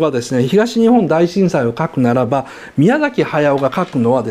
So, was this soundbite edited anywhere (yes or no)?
no